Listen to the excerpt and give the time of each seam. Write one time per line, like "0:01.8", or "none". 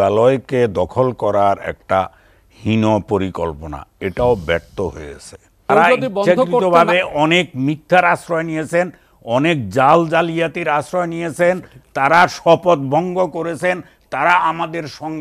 0:05.7